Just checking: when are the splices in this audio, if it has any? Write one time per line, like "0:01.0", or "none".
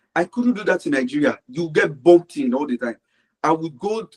none